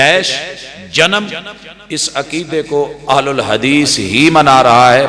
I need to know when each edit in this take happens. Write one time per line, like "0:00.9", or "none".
none